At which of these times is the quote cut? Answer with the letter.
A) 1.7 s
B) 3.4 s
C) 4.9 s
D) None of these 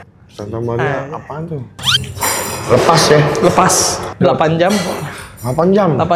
A